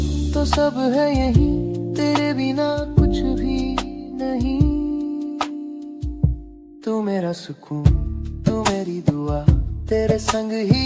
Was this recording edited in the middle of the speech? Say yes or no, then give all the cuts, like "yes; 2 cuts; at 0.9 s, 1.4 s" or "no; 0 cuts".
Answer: no; 0 cuts